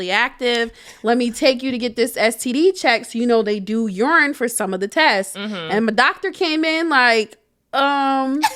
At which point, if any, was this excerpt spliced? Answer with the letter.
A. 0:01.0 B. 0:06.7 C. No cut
C